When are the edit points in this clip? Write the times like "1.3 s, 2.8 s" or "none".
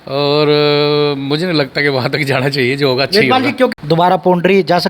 3.7 s